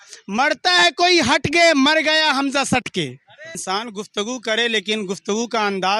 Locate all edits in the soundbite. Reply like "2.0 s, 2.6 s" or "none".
3.5 s